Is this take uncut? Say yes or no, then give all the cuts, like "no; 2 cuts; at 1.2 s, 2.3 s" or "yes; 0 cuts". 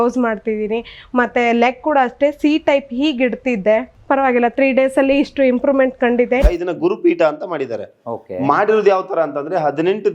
no; 1 cut; at 6.4 s